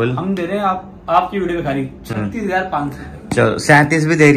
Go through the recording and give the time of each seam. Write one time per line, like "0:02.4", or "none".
none